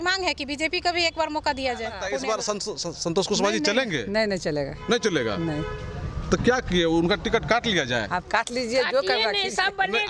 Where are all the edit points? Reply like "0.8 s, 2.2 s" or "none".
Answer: 2.0 s